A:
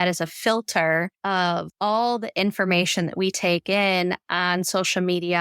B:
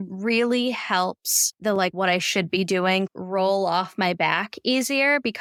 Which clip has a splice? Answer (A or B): A